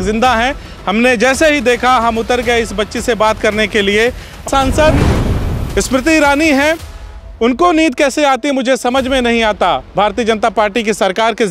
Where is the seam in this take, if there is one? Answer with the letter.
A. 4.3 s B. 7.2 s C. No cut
A